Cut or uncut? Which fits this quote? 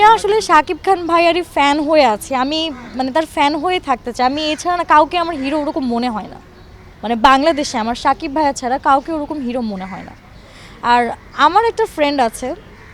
uncut